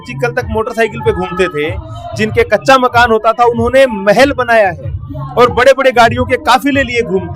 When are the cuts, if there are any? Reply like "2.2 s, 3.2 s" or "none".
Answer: none